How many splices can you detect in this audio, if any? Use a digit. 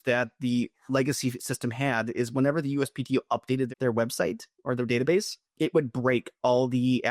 2